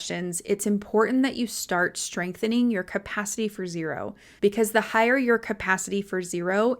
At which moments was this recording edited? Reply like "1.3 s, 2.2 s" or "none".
4.2 s